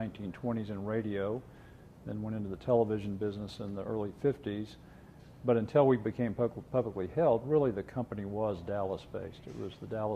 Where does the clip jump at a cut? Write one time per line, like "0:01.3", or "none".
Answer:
0:02.9